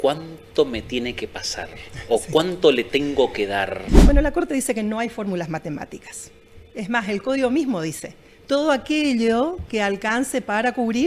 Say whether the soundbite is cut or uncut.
cut